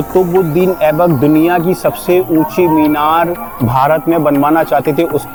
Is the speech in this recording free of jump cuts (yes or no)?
yes